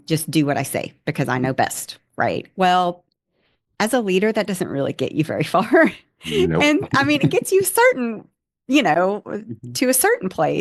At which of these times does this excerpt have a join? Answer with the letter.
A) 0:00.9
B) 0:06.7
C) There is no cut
C